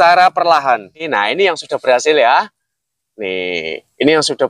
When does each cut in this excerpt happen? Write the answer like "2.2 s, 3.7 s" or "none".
1.0 s